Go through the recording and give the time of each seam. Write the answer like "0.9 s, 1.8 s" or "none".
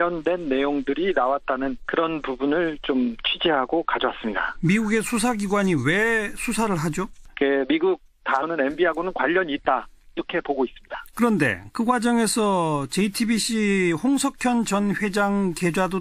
none